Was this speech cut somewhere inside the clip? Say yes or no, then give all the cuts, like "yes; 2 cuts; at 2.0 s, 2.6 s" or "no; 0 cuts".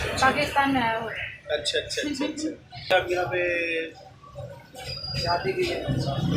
yes; 1 cut; at 2.9 s